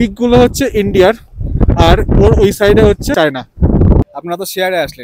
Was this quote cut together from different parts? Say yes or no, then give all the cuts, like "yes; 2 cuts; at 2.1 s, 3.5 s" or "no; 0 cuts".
yes; 2 cuts; at 3.1 s, 4.1 s